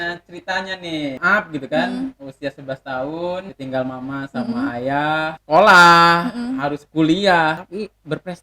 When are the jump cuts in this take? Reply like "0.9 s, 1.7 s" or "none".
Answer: 1.2 s, 3.5 s, 5.4 s, 7.6 s